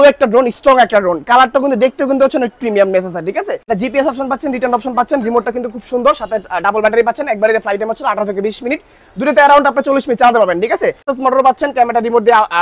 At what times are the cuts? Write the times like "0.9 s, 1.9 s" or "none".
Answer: 3.6 s, 11.1 s